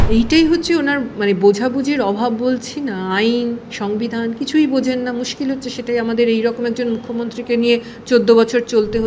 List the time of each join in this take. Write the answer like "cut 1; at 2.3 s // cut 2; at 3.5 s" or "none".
none